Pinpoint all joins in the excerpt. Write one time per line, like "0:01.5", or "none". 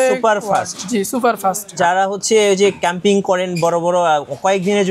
0:01.8